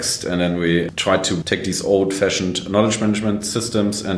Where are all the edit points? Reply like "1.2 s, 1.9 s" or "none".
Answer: 0.9 s